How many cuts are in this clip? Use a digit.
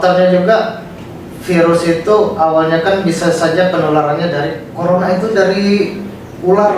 1